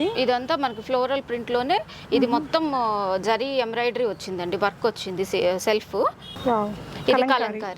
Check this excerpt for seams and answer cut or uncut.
cut